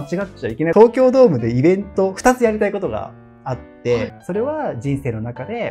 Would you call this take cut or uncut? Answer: cut